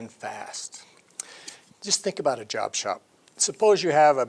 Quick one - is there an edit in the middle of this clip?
yes; 1 cut; at 1.2 s

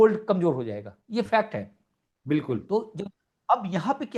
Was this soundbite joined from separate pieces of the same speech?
no; 0 cuts

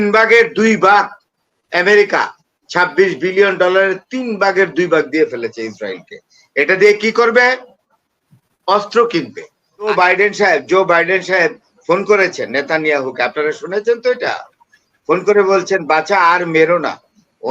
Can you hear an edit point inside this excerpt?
yes; 1 cut; at 9.9 s

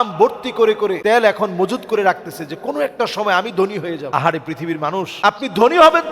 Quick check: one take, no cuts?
no; 3 cuts; at 1.0 s, 4.1 s, 5.1 s

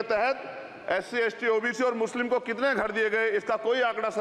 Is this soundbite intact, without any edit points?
yes; 0 cuts

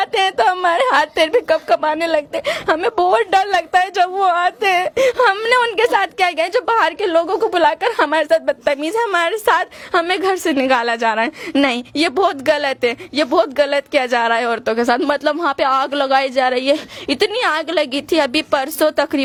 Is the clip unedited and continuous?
yes; 0 cuts

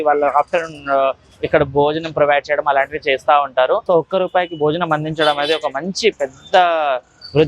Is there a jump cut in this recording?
yes; 1 cut; at 3.8 s

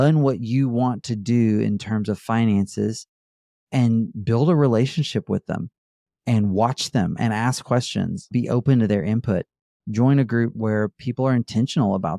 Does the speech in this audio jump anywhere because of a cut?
yes; 2 cuts; at 8.3 s, 10.6 s

